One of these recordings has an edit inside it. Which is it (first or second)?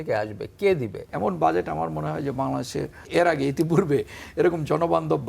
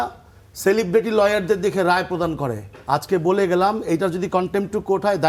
first